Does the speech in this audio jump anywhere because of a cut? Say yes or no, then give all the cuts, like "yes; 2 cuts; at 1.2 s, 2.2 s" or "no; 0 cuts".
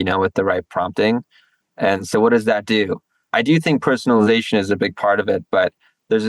yes; 1 cut; at 3.3 s